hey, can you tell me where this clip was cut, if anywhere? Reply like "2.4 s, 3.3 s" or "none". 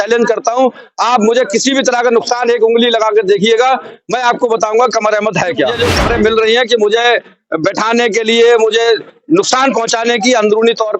5.8 s